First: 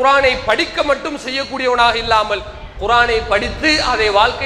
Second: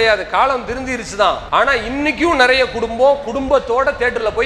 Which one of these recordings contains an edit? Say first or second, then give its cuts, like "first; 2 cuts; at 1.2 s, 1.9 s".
second; 1 cut; at 1.4 s